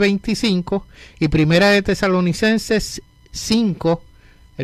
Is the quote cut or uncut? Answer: cut